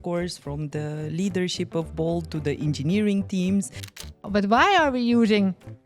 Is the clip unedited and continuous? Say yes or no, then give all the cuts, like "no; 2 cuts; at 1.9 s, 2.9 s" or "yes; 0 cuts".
no; 1 cut; at 4.1 s